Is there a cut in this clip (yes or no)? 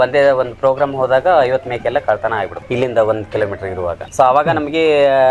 yes